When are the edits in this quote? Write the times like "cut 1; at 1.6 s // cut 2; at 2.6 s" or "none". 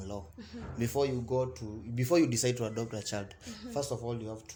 none